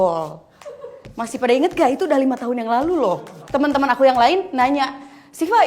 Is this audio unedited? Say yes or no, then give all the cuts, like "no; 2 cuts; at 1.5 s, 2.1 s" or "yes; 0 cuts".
no; 1 cut; at 3.4 s